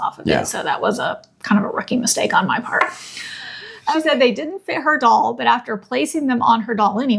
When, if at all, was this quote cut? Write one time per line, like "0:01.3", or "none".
0:03.7

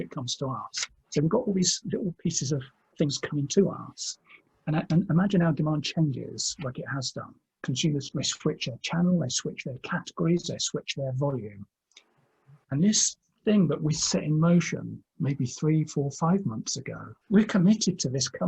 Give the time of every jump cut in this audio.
0:08.1
0:17.1

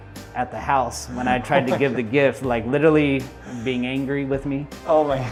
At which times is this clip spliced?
none

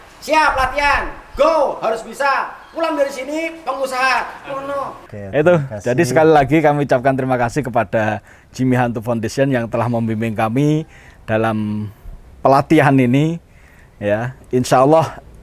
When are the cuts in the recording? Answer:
0:05.0

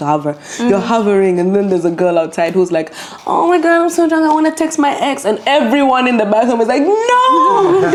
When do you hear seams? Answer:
none

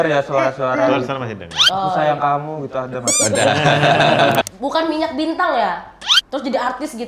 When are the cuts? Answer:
0:04.4

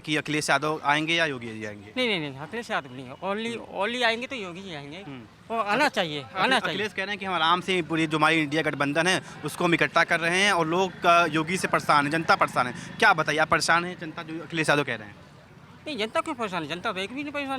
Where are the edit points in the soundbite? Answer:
none

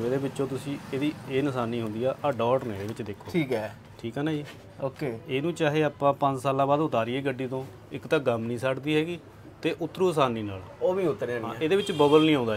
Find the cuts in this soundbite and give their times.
none

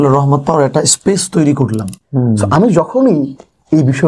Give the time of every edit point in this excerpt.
0:02.0

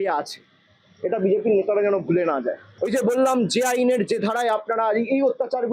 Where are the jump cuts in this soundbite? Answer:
0:02.6

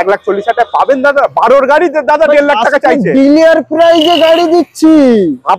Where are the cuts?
none

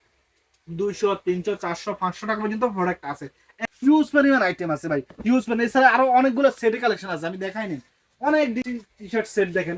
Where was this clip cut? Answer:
0:03.5
0:08.6

